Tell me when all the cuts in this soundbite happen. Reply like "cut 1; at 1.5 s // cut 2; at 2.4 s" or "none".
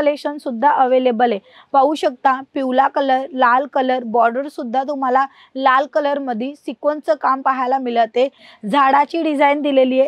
cut 1; at 8.4 s